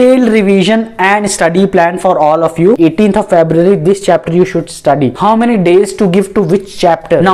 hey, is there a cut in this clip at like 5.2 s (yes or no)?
yes